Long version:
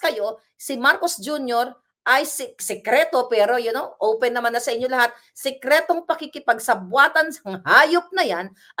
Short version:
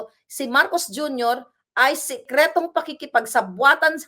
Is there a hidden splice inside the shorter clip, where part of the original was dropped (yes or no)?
yes